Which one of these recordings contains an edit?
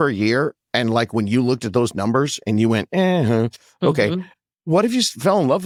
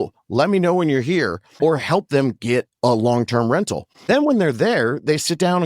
second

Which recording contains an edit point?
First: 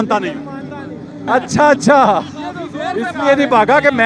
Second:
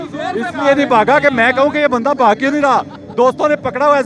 first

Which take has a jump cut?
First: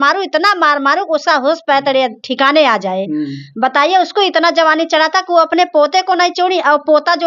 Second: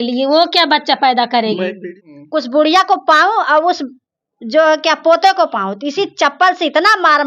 second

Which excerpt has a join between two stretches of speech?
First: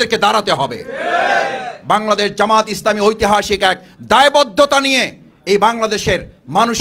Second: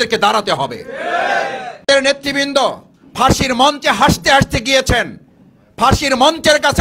second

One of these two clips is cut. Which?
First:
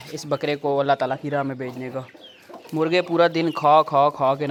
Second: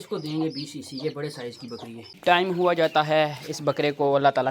second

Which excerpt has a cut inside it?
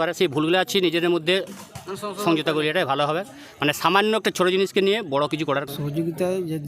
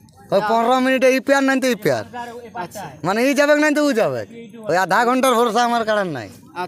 first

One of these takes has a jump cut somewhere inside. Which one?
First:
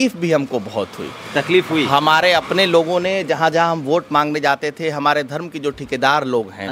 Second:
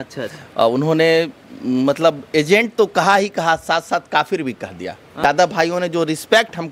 second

